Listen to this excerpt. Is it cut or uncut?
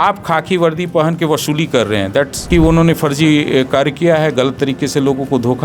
cut